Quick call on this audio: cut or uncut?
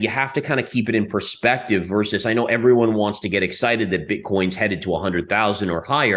uncut